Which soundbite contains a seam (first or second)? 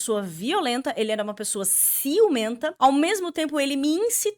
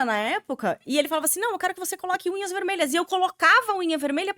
first